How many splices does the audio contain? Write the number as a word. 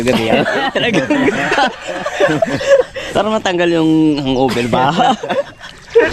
one